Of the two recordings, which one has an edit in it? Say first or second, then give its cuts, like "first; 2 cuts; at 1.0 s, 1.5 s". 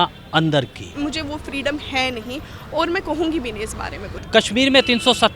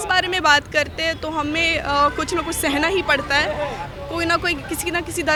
first; 2 cuts; at 0.9 s, 4.1 s